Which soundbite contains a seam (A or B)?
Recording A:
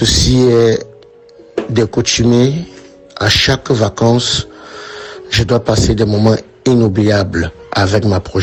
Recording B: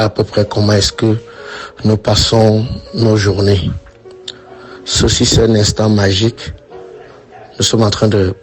B